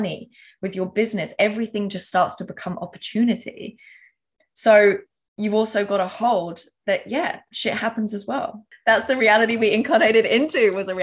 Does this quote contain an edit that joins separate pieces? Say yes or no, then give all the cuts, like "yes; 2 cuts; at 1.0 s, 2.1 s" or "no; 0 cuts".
yes; 1 cut; at 8.7 s